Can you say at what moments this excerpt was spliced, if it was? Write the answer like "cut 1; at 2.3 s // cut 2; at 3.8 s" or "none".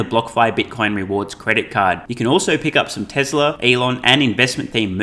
cut 1; at 3.6 s